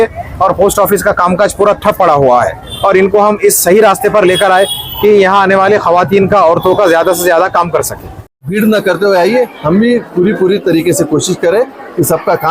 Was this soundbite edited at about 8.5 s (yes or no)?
yes